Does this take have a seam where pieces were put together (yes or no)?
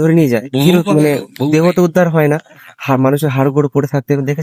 no